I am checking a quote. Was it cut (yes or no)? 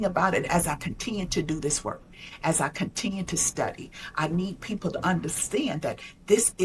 no